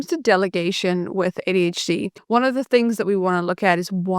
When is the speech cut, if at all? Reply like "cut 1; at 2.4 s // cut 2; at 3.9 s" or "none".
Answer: cut 1; at 2.2 s